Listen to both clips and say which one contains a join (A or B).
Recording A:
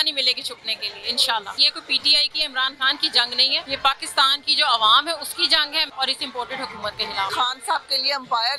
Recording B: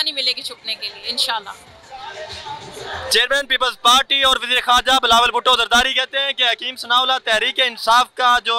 A